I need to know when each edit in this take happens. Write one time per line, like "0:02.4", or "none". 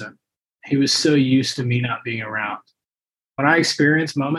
0:03.3